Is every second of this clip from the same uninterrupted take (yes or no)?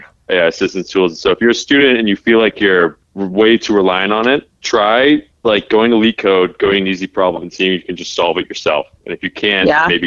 yes